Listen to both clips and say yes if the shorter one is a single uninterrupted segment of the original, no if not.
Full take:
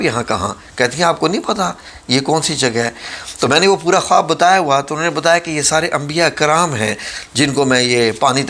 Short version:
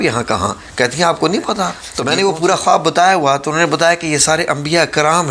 no